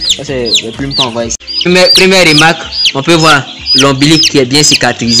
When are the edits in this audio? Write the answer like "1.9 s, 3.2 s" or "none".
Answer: 1.4 s